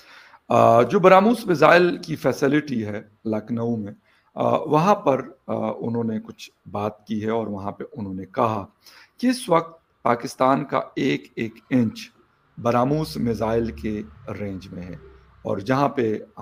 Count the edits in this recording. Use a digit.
0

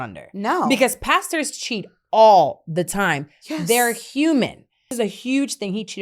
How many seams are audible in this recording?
1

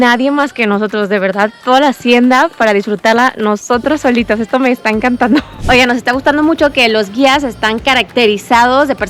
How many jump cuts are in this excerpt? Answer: 1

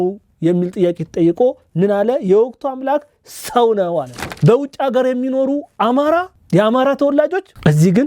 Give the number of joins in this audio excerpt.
1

